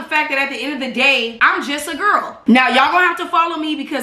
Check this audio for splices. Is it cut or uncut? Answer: cut